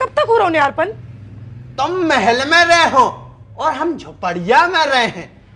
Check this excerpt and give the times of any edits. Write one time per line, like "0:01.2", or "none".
0:01.1